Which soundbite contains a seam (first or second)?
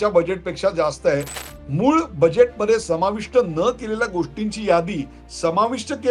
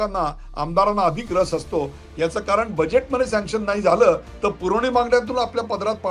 first